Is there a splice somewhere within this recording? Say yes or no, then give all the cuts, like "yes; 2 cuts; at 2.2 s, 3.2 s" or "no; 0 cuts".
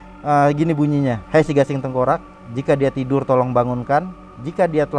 yes; 1 cut; at 1.2 s